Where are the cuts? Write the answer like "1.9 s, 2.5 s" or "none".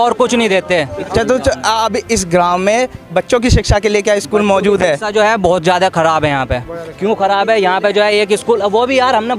1.1 s